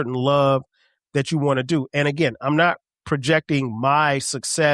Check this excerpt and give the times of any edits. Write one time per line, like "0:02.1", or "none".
none

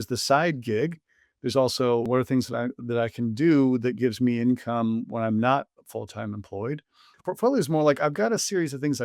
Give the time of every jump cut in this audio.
0:07.1

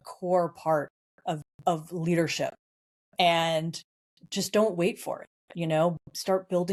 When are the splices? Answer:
none

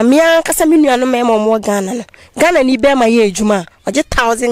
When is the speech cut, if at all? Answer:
none

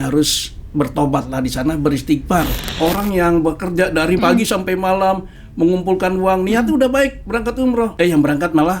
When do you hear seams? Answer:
0:02.7
0:04.2
0:07.9

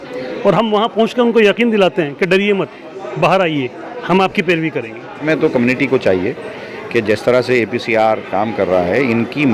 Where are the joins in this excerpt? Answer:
0:05.2

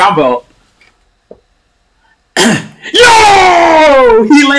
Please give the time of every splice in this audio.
none

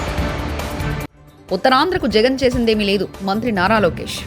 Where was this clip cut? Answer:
0:01.1

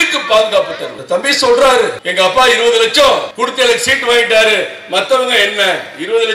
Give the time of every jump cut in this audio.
0:00.9
0:02.0
0:03.3

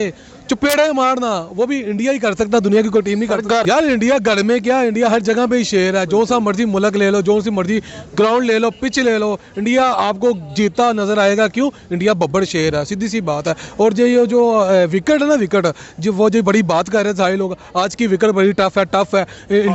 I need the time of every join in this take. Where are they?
0:03.6

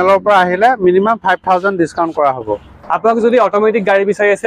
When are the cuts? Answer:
0:02.7

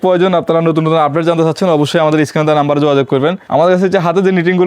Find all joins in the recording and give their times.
0:03.4

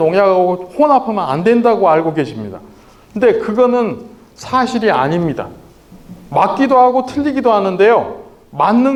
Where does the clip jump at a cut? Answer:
none

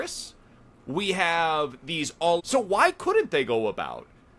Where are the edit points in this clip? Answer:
0:02.4

